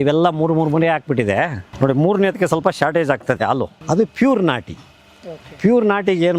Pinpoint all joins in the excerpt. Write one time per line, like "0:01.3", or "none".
0:01.6
0:03.8